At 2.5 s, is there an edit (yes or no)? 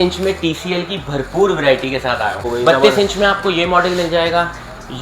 yes